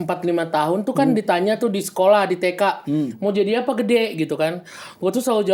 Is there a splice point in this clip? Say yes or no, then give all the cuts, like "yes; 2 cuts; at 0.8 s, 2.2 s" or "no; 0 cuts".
no; 0 cuts